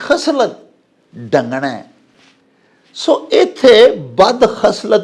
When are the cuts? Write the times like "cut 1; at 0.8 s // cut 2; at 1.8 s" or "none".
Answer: none